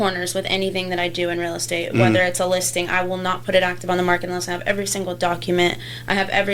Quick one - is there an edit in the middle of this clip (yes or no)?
no